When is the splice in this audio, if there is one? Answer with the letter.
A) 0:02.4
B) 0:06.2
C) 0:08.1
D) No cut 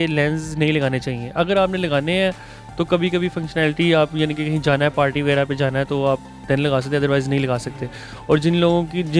D